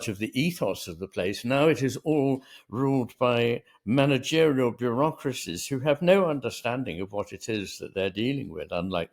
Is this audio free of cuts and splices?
yes; 0 cuts

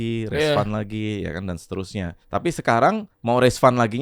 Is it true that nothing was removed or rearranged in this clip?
no; 2 cuts; at 2.2 s, 3.1 s

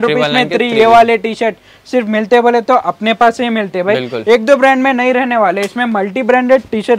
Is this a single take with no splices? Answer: yes; 0 cuts

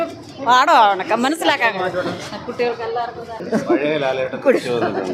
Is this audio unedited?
no; 1 cut; at 3.4 s

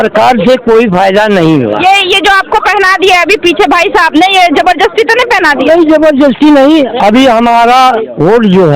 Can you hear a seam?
no; 0 cuts

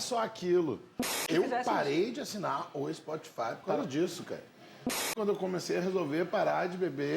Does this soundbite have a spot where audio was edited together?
yes; 2 cuts; at 1.3 s, 5.1 s

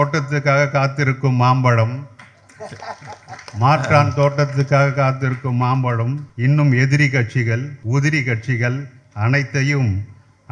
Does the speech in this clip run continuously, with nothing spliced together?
no; 2 cuts; at 6.2 s, 7.7 s

